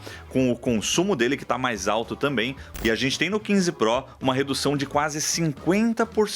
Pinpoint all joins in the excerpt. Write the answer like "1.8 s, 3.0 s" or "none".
2.7 s